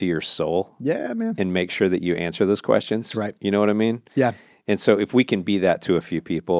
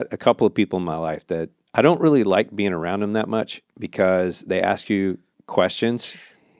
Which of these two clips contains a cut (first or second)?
second